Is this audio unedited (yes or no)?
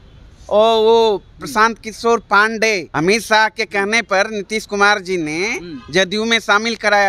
no